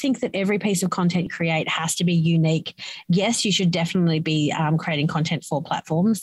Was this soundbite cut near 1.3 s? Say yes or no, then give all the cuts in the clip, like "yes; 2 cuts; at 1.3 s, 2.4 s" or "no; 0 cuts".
yes; 1 cut; at 1.3 s